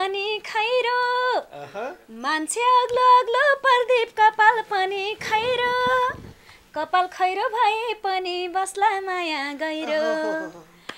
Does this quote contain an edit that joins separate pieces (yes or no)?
no